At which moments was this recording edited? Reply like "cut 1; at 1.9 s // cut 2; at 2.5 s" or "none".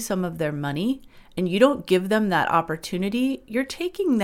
none